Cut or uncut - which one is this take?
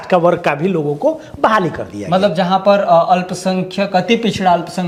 uncut